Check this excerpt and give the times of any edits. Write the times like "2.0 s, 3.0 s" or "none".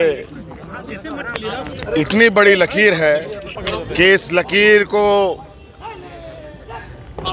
3.6 s